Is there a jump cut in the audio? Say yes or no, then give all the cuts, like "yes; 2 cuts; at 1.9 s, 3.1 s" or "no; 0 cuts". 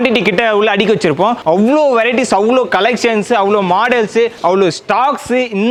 no; 0 cuts